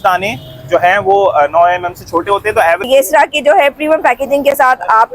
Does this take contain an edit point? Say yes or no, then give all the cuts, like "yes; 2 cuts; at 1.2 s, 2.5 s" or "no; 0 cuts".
yes; 1 cut; at 2.8 s